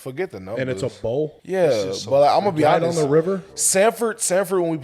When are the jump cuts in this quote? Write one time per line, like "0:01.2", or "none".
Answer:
0:01.4